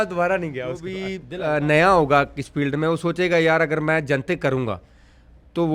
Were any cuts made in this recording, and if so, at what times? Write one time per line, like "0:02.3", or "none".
0:01.1